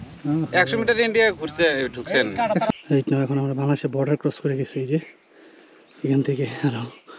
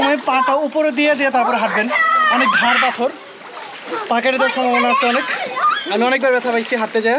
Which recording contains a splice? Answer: first; 1 cut; at 2.7 s

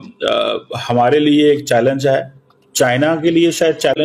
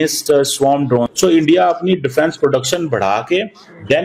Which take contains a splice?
second; 1 cut; at 1.1 s

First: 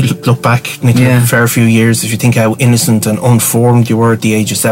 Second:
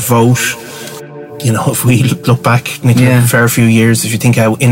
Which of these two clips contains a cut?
second; 1 cut; at 0.9 s

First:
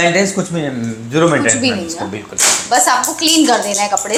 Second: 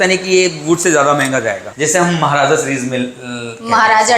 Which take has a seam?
second; 1 cut; at 1.6 s

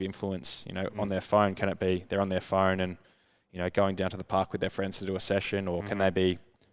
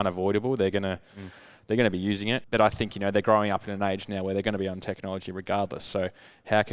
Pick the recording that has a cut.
second; 1 cut; at 2.4 s

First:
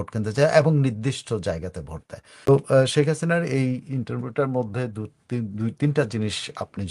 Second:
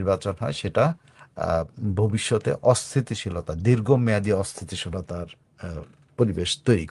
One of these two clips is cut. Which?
first; 1 cut; at 2.5 s

